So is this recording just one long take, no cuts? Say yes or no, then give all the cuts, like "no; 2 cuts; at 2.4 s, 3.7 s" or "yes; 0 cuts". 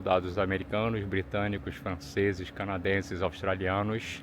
yes; 0 cuts